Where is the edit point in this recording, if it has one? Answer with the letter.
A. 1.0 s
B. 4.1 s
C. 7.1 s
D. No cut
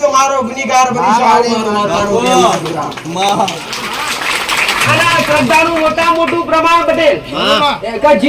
B